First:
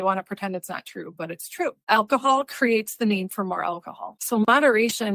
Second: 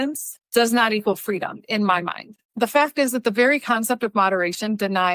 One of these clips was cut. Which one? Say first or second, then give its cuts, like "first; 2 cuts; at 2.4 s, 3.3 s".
second; 1 cut; at 2.4 s